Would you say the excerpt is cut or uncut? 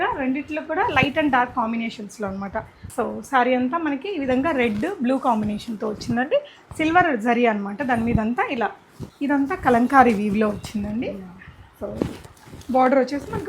cut